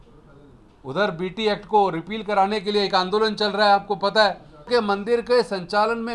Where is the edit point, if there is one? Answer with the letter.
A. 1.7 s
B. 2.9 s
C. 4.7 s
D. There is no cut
C